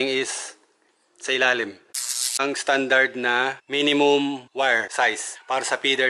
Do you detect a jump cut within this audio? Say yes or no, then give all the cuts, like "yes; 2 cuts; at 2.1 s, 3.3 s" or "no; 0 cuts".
yes; 3 cuts; at 2.3 s, 3.6 s, 5.0 s